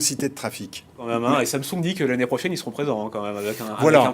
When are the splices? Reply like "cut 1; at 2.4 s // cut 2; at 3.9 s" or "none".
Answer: cut 1; at 1.1 s